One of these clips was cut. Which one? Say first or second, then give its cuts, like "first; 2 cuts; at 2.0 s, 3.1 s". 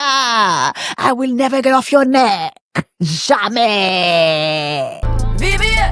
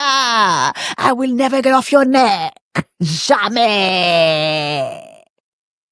first; 1 cut; at 5.0 s